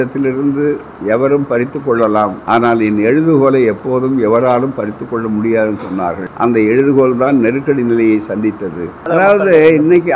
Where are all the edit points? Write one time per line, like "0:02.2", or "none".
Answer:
0:02.4
0:06.2
0:08.9